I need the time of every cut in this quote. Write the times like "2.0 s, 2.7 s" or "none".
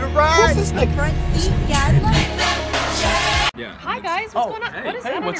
4.0 s